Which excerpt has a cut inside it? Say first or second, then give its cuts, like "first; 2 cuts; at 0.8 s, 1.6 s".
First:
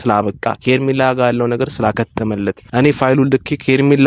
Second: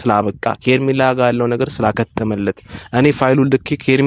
first; 1 cut; at 2.6 s